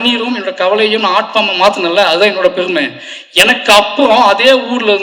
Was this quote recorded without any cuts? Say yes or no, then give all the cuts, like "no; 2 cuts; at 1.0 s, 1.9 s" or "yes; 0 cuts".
yes; 0 cuts